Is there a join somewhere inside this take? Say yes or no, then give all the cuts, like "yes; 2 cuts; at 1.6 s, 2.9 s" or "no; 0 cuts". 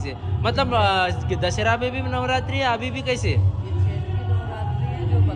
no; 0 cuts